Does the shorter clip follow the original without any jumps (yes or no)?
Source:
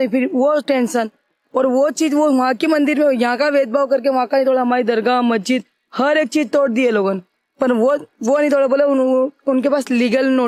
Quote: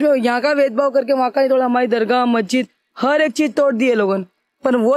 yes